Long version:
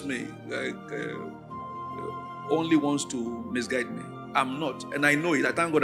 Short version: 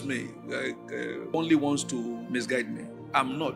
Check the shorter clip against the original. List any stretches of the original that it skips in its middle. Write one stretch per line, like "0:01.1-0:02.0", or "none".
0:01.3-0:02.5